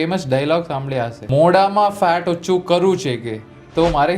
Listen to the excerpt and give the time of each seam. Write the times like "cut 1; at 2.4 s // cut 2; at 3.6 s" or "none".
cut 1; at 1.2 s